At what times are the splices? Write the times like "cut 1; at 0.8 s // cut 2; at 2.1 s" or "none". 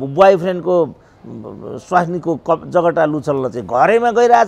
none